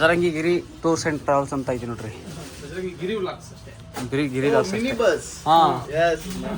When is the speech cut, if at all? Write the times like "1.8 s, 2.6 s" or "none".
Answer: none